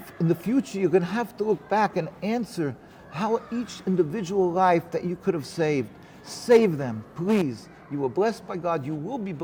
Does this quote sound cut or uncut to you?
uncut